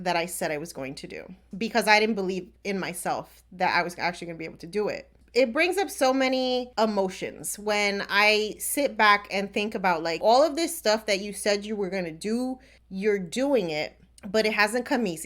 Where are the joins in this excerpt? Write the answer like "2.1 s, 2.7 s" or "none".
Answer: 5.2 s, 6.7 s, 10.2 s